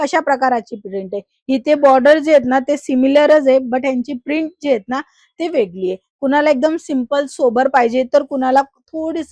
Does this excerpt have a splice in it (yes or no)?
no